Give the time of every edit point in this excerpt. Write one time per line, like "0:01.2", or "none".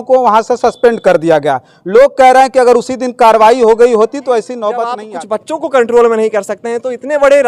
0:04.9